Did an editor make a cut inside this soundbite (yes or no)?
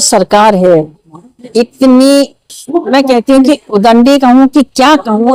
no